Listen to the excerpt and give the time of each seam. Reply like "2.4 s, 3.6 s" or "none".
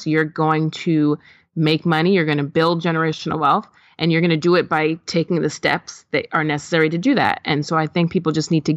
none